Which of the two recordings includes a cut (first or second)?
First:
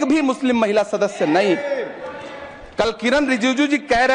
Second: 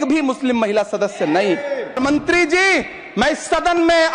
second